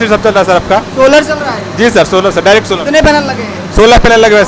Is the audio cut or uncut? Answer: uncut